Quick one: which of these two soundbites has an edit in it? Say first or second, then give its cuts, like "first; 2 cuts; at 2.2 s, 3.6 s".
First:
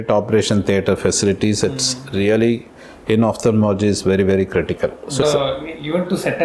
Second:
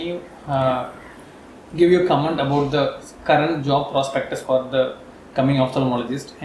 first; 1 cut; at 5.2 s